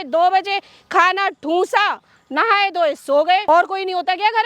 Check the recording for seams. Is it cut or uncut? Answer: cut